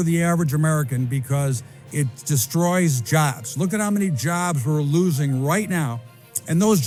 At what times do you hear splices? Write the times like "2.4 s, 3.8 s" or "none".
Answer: none